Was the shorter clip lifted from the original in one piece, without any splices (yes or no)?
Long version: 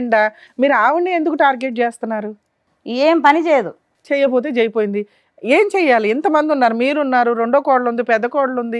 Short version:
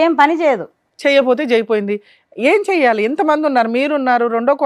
yes